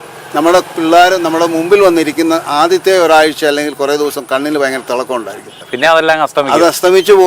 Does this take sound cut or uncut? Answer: cut